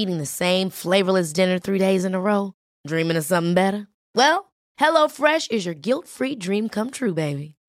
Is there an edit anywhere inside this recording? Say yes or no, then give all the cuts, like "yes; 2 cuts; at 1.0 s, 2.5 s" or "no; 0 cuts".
no; 0 cuts